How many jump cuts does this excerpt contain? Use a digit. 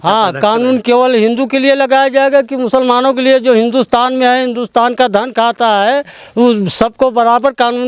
0